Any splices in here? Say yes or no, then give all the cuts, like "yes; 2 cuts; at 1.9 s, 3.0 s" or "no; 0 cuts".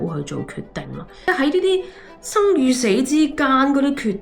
yes; 1 cut; at 1.3 s